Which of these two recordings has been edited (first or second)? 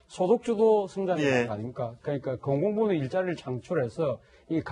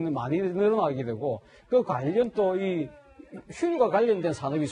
second